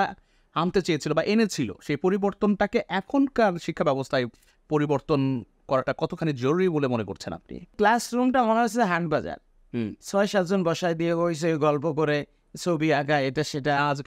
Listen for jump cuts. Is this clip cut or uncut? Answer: cut